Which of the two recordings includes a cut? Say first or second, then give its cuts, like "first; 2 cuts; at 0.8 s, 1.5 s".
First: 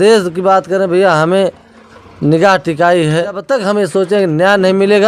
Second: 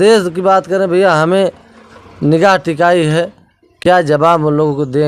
first; 1 cut; at 3.5 s